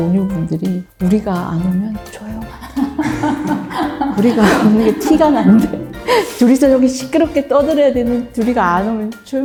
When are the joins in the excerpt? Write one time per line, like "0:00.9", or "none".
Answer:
none